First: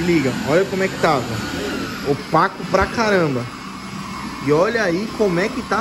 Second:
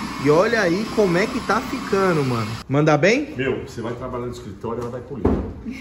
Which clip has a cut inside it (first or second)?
second